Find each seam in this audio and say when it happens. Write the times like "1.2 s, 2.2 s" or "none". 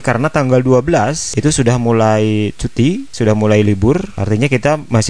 none